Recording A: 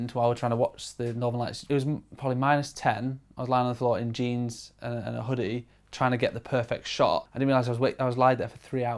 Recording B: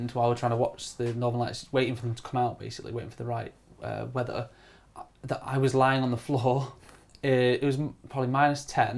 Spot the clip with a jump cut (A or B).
A